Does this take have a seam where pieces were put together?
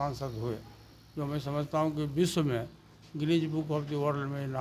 no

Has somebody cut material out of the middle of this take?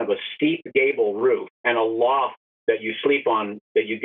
yes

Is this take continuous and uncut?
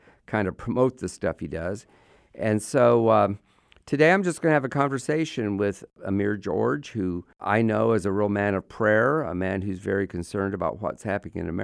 no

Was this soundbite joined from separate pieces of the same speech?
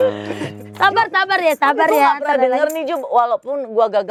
no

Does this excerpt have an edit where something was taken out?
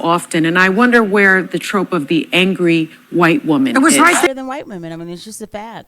yes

